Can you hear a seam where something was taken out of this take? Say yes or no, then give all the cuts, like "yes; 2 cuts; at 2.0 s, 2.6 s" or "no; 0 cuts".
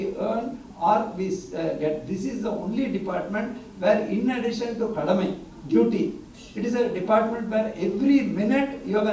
no; 0 cuts